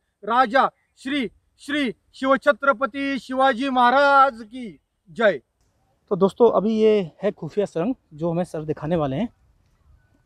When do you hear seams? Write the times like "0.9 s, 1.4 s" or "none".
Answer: 5.8 s